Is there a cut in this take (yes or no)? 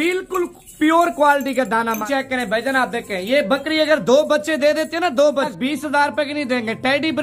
yes